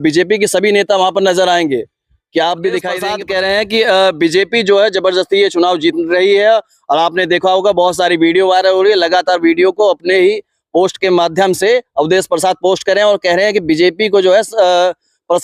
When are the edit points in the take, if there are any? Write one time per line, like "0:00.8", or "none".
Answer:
0:03.2